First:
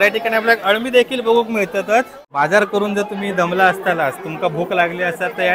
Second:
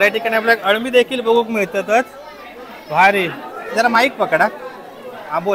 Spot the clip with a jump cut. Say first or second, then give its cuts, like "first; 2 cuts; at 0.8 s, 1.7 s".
first; 1 cut; at 2.2 s